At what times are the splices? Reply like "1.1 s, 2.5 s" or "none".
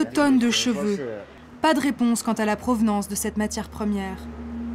1.3 s